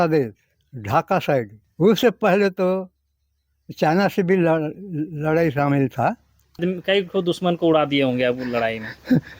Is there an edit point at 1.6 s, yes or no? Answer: yes